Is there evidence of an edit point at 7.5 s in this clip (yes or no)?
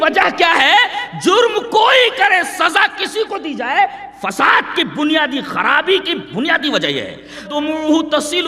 yes